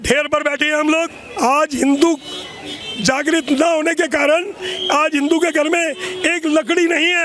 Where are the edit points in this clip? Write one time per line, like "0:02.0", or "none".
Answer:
0:01.2